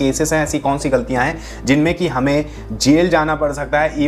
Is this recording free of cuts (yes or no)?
yes